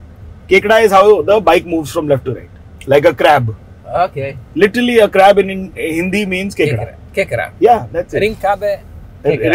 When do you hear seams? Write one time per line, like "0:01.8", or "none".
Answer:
none